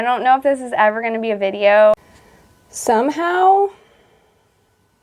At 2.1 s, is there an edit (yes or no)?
yes